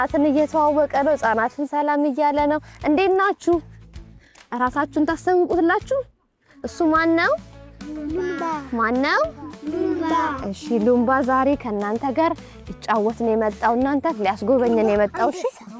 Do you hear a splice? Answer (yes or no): no